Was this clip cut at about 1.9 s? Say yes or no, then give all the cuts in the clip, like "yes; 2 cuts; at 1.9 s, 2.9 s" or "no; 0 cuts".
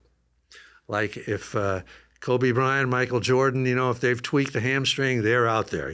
no; 0 cuts